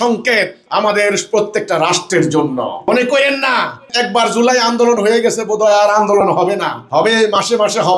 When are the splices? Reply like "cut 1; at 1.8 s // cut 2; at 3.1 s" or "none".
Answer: none